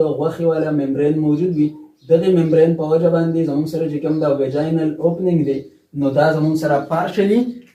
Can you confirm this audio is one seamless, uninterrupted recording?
yes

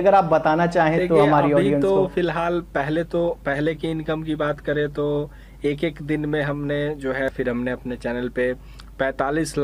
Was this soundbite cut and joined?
yes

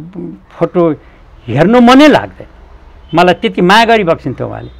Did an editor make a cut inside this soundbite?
no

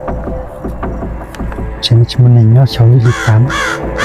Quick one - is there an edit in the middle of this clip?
no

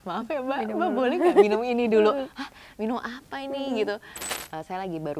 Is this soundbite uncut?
no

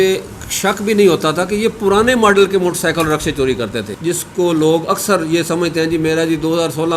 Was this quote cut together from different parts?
yes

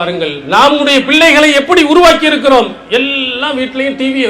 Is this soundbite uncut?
yes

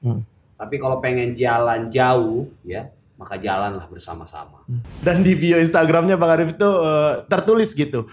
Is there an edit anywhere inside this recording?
yes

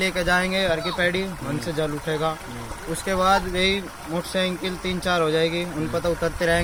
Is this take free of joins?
yes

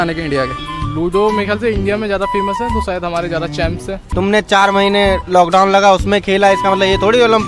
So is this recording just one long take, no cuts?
no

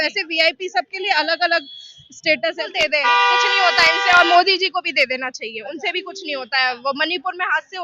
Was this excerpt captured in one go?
no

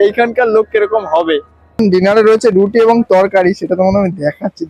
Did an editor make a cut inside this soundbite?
yes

